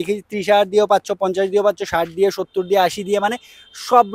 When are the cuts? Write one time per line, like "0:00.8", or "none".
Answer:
none